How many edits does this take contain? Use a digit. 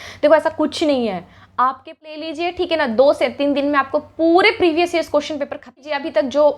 2